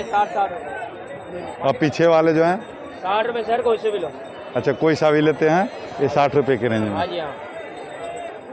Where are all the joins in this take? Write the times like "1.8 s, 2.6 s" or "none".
none